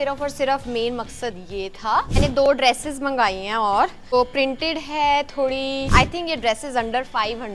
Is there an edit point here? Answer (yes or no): yes